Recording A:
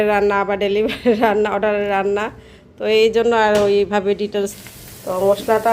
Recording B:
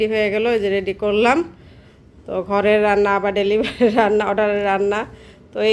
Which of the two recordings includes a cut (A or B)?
A